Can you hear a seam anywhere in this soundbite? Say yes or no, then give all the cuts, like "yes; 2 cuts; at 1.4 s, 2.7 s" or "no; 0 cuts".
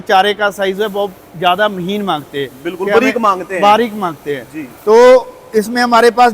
no; 0 cuts